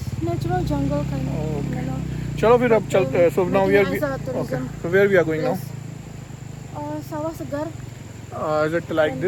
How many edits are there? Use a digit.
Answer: 0